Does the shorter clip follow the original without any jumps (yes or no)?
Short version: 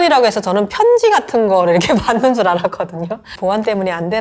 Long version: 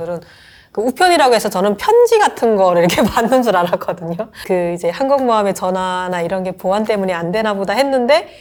no